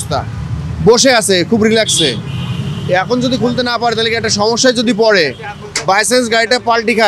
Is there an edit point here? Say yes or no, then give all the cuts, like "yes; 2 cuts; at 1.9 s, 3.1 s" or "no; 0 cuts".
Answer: no; 0 cuts